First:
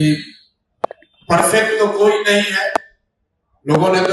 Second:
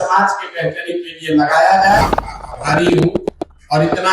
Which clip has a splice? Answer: second; 1 cut; at 2.0 s

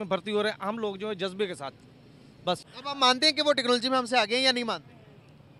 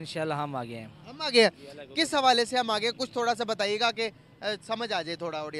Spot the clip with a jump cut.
first; 1 cut; at 2.6 s

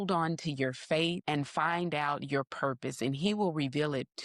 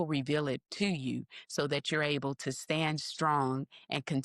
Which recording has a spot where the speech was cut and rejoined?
first; 1 cut; at 1.2 s

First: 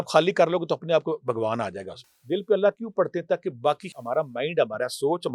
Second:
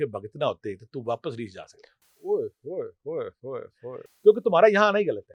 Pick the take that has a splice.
first; 2 cuts; at 1.9 s, 3.9 s

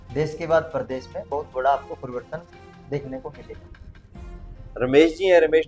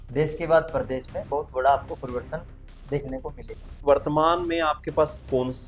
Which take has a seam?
second; 1 cut; at 3.8 s

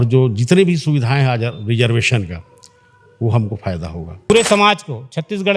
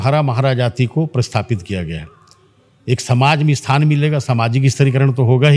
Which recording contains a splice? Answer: first; 1 cut; at 4.3 s

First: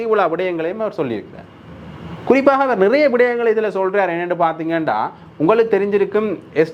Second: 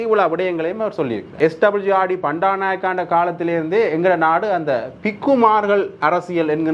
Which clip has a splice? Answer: second; 1 cut; at 1.3 s

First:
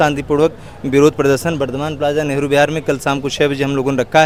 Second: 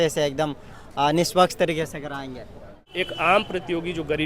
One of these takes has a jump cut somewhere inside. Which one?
second; 1 cut; at 2.9 s

